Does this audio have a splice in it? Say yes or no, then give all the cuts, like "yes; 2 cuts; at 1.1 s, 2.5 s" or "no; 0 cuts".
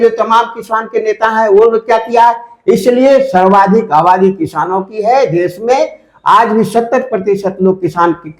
no; 0 cuts